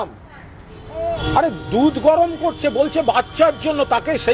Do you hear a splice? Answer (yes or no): yes